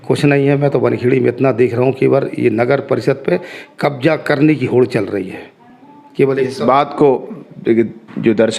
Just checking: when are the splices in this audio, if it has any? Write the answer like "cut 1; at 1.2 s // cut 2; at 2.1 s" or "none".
none